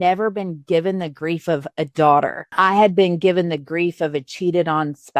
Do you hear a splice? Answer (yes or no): yes